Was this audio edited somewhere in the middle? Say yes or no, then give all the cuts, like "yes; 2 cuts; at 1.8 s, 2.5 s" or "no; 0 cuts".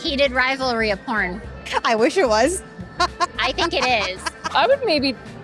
yes; 2 cuts; at 1.7 s, 4.4 s